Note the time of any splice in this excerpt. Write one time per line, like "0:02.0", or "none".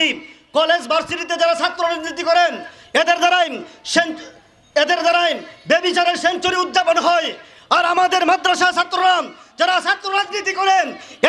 none